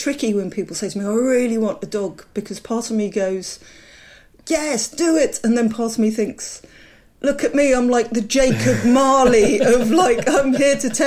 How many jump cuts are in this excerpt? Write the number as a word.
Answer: zero